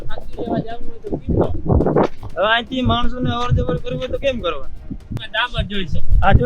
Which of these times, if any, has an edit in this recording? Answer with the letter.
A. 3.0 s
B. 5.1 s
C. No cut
B